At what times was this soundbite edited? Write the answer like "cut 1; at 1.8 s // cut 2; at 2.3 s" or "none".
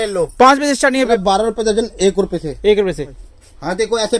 cut 1; at 1.2 s // cut 2; at 3.1 s